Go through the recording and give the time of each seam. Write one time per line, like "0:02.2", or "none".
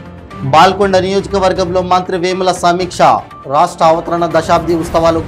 none